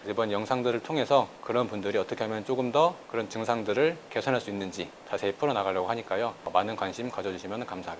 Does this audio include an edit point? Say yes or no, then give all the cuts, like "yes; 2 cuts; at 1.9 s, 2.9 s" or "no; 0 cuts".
yes; 1 cut; at 5.1 s